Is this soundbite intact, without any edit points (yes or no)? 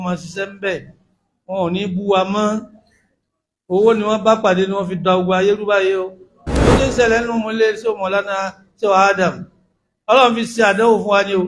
no